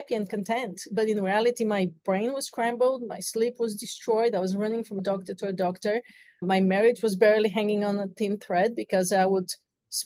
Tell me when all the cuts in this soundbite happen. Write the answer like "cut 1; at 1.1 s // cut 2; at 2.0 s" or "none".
cut 1; at 5.0 s